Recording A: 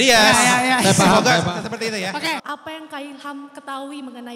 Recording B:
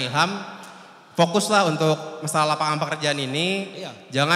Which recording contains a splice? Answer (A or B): A